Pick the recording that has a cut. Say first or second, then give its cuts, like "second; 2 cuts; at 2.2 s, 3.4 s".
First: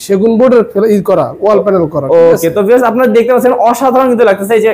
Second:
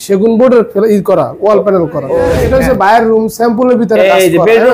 second; 1 cut; at 2.3 s